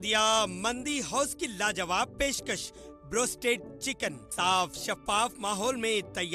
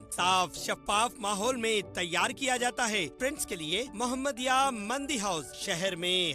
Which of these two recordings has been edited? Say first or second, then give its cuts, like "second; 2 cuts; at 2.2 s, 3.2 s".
second; 1 cut; at 3.1 s